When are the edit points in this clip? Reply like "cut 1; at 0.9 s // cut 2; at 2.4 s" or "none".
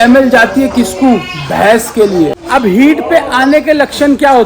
cut 1; at 2.4 s